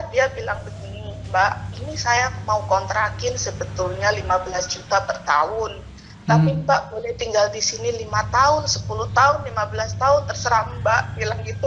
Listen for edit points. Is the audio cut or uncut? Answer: uncut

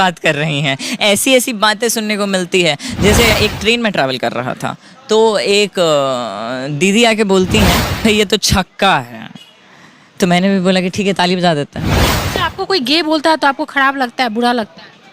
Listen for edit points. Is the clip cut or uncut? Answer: cut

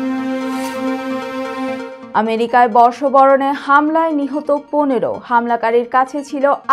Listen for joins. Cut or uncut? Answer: cut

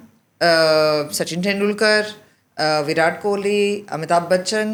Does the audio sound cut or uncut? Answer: uncut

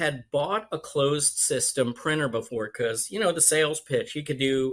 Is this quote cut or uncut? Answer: uncut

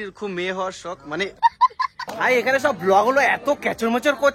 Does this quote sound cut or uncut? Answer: cut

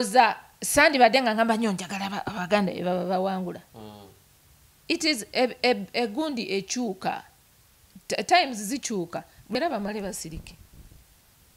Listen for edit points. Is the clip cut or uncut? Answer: cut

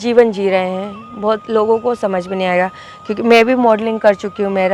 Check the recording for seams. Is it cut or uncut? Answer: uncut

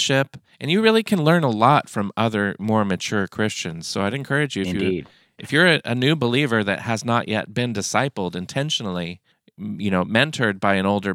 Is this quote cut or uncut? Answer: uncut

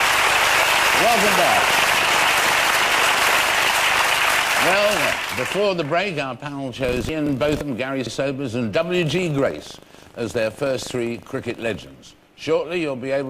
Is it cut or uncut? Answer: cut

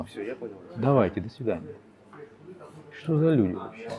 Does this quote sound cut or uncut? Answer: uncut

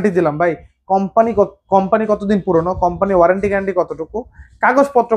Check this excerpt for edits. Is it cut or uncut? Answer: uncut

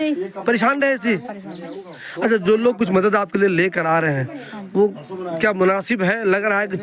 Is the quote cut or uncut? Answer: uncut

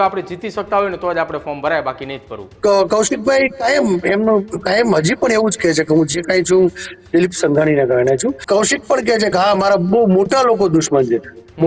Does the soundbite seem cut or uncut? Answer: cut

